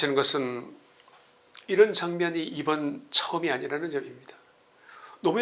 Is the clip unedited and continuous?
yes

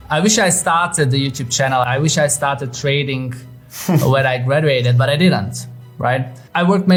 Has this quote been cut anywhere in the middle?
no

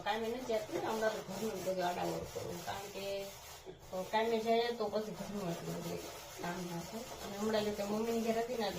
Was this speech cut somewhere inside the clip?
no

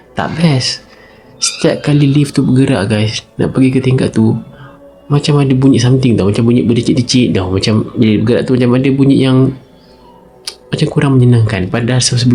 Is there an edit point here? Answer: no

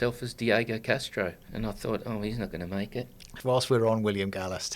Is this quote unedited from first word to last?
no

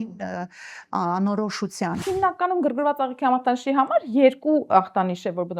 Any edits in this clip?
yes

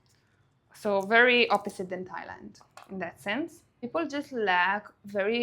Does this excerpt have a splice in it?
yes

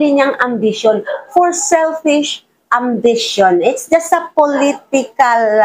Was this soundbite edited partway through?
no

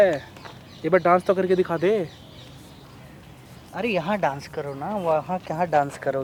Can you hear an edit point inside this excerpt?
no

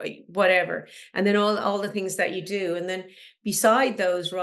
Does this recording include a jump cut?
no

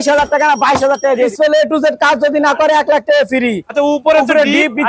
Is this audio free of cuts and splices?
no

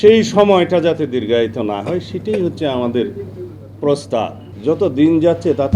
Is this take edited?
yes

